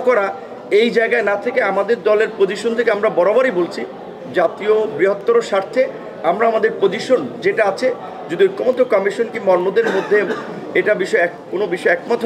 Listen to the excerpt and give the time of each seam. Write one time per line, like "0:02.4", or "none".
none